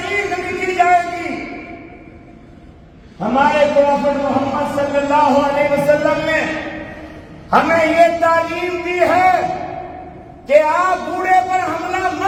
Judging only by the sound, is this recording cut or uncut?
uncut